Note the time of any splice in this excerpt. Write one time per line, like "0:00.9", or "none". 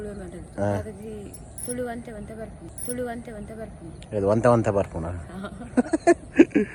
none